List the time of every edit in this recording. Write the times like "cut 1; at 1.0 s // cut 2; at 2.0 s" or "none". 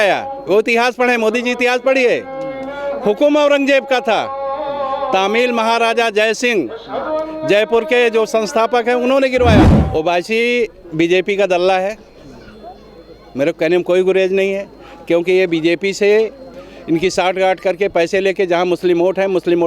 cut 1; at 9.8 s

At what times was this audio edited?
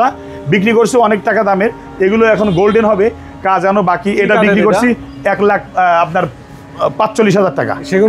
none

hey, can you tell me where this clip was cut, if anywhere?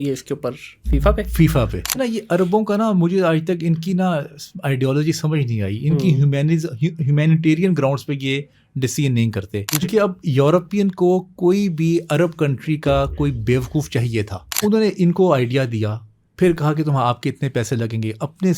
cut 1; at 1.9 s // cut 2; at 9.8 s // cut 3; at 14.4 s

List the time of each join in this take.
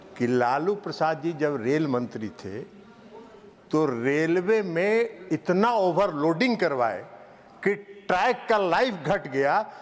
none

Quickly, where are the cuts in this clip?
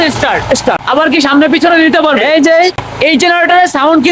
cut 1; at 0.8 s // cut 2; at 2.9 s

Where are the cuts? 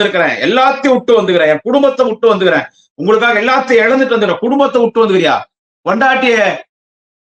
none

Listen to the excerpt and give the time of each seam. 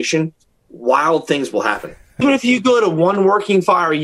cut 1; at 2.2 s

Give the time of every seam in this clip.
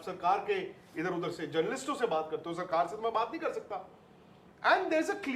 none

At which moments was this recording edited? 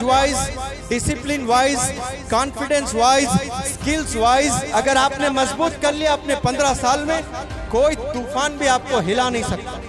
none

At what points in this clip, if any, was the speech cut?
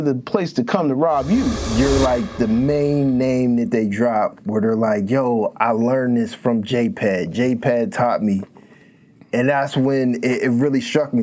cut 1; at 1.6 s

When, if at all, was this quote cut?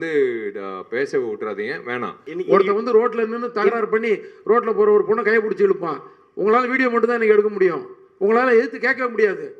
cut 1; at 2.2 s

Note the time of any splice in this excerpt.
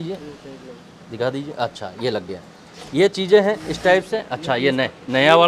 none

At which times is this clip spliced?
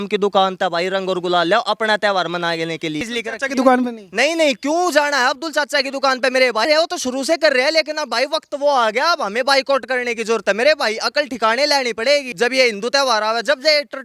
cut 1; at 3.0 s // cut 2; at 6.6 s // cut 3; at 12.3 s

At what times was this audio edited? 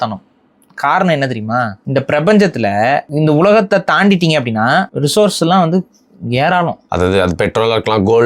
cut 1; at 1.8 s // cut 2; at 3.1 s // cut 3; at 4.9 s // cut 4; at 6.8 s

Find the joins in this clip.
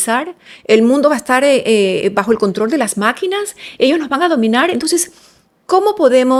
none

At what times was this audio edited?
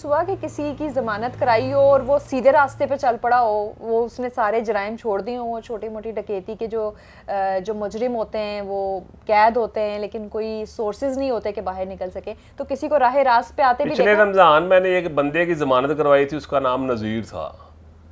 none

